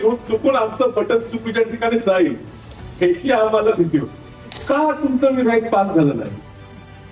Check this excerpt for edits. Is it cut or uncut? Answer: cut